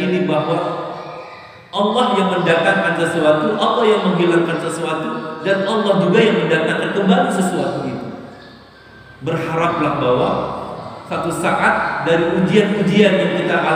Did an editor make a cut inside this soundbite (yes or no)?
no